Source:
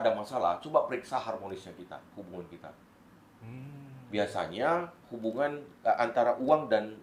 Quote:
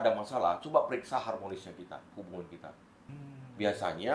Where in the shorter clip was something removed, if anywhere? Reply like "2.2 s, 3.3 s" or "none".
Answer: 3.1 s